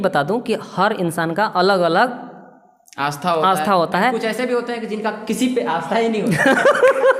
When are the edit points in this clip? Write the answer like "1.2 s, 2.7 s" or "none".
none